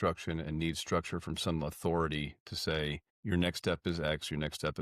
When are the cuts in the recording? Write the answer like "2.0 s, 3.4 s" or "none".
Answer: 3.1 s